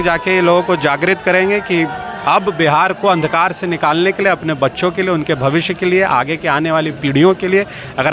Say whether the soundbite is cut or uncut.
uncut